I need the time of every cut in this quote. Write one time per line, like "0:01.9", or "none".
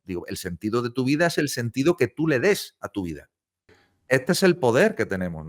0:03.9